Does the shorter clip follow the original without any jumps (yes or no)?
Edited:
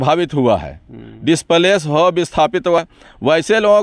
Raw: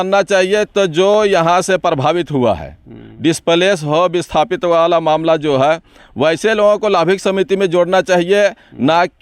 no